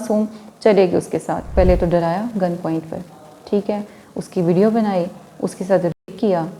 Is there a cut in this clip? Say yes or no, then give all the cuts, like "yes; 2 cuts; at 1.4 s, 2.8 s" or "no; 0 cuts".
yes; 1 cut; at 1.5 s